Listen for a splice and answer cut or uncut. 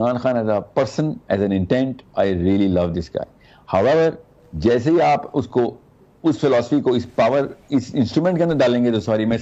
uncut